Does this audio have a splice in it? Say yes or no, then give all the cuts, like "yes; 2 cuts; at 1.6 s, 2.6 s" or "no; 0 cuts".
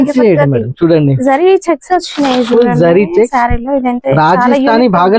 no; 0 cuts